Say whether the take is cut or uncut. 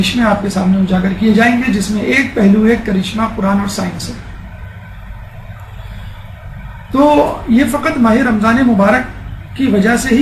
cut